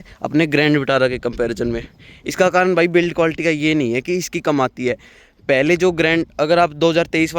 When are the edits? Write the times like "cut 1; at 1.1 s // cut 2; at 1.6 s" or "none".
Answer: none